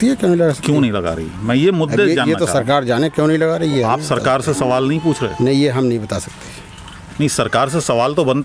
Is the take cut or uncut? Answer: uncut